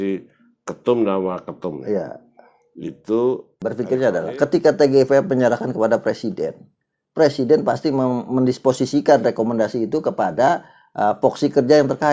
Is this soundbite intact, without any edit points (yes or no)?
no